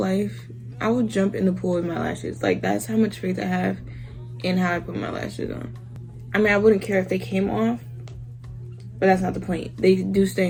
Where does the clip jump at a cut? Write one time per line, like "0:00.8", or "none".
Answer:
none